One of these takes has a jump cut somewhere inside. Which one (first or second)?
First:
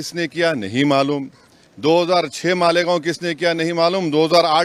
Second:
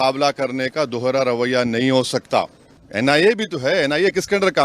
second